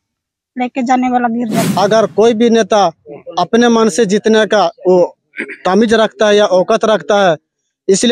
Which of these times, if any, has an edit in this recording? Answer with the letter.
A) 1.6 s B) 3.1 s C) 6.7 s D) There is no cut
A